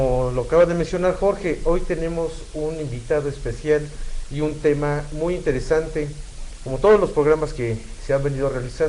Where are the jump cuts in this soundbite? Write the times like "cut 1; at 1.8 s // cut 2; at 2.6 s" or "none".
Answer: cut 1; at 3.6 s